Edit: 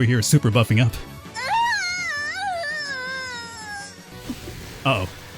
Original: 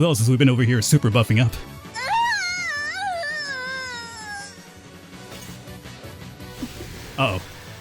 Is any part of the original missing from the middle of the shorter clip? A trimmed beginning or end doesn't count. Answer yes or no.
yes